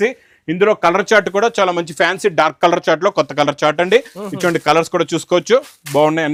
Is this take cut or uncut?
uncut